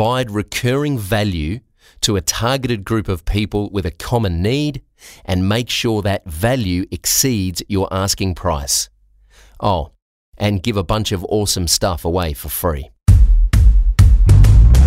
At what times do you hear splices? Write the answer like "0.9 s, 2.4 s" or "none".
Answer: 12.9 s